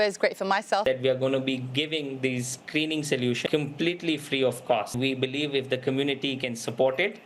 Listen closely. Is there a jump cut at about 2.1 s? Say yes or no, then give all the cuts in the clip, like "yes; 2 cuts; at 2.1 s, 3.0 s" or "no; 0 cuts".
no; 3 cuts; at 0.8 s, 3.4 s, 4.9 s